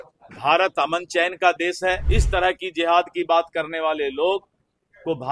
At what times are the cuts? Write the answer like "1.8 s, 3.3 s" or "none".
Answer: 2.0 s